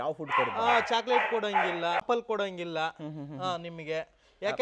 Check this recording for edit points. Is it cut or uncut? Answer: cut